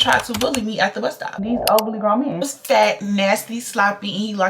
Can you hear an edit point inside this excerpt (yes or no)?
yes